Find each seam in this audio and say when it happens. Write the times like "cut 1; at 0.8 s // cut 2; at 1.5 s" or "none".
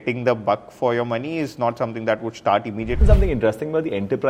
cut 1; at 3.0 s

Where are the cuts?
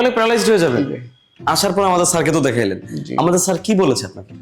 cut 1; at 1.3 s

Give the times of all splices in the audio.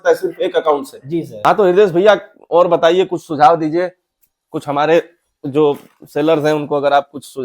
cut 1; at 1.4 s

